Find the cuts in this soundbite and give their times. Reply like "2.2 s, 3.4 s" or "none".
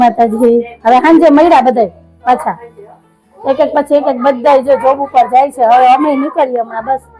none